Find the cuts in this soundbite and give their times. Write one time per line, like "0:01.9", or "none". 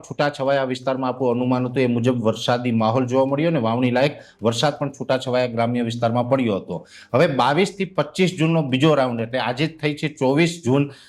none